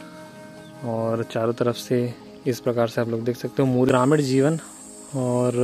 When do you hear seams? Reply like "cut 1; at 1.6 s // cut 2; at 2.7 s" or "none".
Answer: cut 1; at 3.9 s